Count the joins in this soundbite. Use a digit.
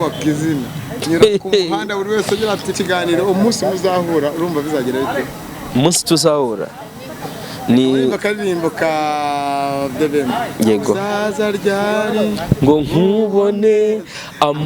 1